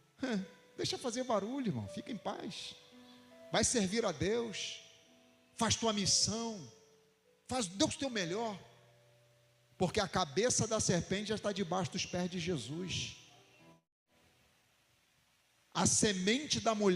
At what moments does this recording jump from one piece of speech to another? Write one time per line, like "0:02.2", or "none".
0:13.7